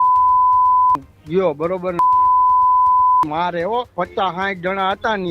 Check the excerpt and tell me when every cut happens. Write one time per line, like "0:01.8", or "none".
0:03.9